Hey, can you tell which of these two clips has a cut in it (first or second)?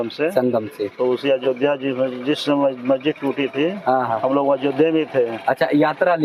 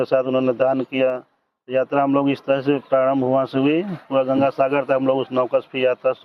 second